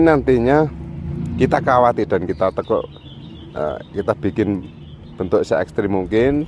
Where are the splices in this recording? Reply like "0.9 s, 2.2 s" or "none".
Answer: 1.1 s